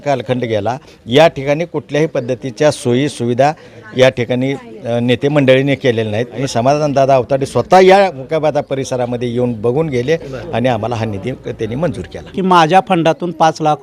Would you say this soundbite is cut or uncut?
cut